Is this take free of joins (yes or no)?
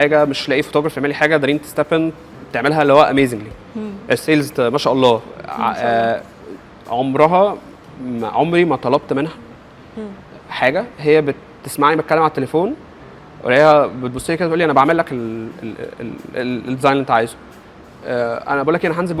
yes